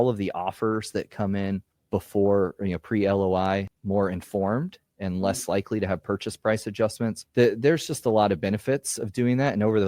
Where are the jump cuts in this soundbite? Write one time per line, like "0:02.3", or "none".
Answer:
0:01.7
0:03.7
0:07.2